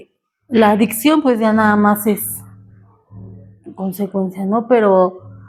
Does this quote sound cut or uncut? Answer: uncut